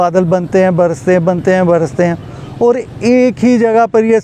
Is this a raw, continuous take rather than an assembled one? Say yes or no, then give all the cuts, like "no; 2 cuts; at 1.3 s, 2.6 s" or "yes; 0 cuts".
yes; 0 cuts